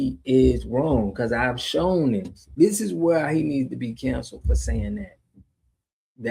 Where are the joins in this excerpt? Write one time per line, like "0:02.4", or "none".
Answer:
0:02.4